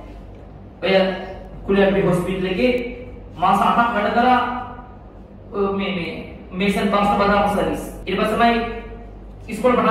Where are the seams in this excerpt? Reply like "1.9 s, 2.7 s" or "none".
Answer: 8.0 s